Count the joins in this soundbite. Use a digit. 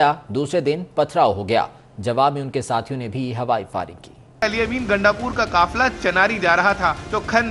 1